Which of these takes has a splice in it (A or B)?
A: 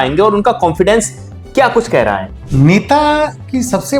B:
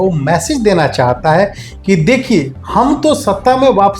A